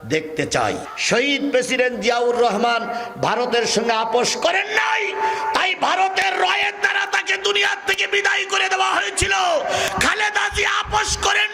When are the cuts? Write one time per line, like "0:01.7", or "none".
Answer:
0:00.9